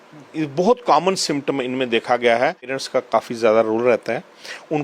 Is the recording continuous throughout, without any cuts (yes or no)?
no